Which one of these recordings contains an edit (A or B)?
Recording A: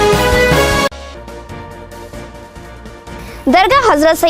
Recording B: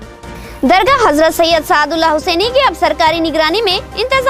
A